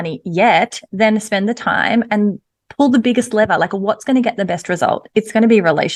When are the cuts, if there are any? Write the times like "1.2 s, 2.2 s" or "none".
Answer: none